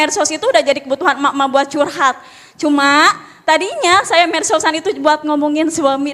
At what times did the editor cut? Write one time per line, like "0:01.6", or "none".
none